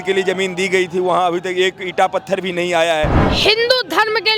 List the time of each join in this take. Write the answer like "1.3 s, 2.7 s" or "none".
3.2 s